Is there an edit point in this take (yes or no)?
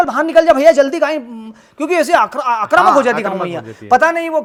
no